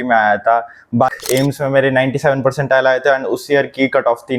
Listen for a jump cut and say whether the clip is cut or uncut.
cut